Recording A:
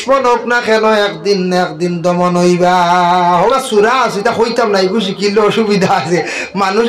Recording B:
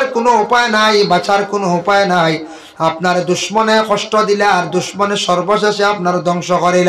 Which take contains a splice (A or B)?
A